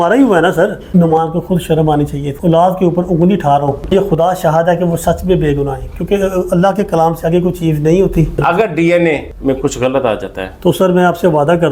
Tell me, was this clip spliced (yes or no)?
yes